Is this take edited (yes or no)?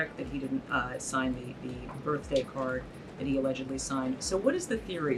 no